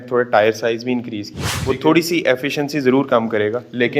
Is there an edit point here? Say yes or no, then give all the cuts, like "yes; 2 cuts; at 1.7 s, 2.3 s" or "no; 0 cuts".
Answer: yes; 1 cut; at 1.6 s